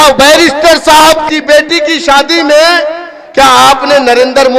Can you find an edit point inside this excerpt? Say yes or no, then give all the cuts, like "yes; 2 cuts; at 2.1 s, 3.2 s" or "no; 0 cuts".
yes; 1 cut; at 1.3 s